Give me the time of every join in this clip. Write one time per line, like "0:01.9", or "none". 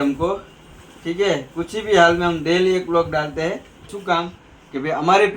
0:03.9

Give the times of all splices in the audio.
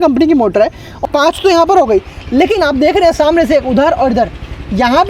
0:00.9

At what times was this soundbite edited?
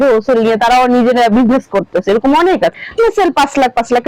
0:02.8

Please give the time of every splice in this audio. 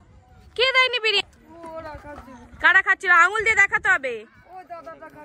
0:01.2

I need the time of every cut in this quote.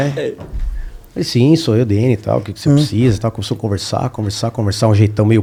none

